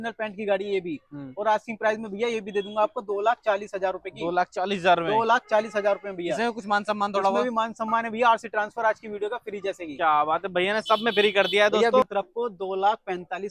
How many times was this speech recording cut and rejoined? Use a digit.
1